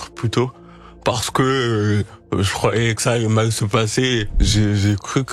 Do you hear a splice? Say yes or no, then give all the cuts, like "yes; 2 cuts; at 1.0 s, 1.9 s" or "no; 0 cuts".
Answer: yes; 1 cut; at 4.4 s